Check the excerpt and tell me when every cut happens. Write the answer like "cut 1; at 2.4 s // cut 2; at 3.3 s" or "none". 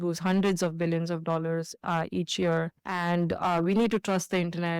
none